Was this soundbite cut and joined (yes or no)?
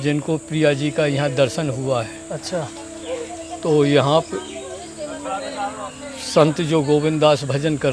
no